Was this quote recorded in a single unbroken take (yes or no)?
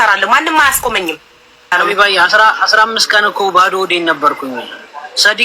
no